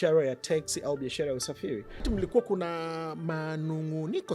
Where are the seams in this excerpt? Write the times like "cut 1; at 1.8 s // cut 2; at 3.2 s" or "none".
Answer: cut 1; at 2.0 s